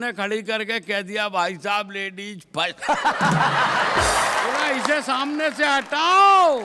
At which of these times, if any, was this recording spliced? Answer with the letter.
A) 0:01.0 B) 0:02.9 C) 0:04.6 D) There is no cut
C